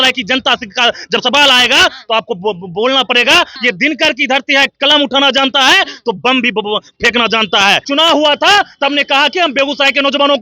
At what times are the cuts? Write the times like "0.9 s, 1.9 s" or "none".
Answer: 3.5 s, 7.9 s

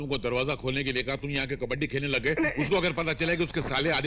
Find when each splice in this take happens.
none

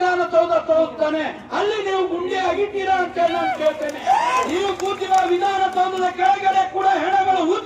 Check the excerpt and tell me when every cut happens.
4.4 s

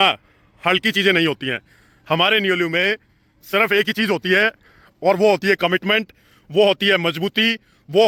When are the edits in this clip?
none

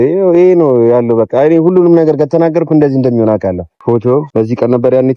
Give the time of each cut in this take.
3.7 s, 4.3 s

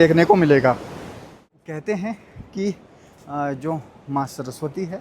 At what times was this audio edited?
1.5 s

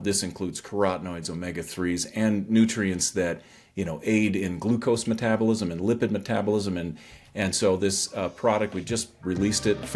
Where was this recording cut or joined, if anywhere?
none

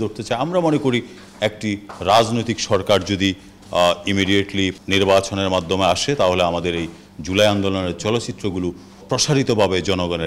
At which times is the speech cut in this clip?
4.8 s, 9.0 s

